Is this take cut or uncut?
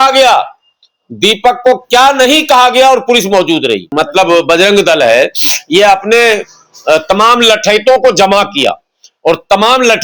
cut